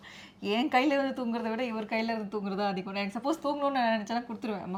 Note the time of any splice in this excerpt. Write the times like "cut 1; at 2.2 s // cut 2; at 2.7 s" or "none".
none